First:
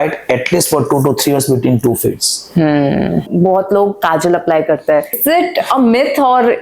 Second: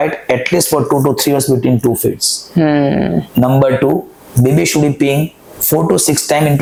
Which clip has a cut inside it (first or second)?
first